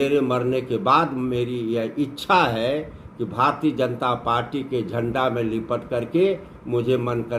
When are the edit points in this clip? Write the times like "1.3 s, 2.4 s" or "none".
none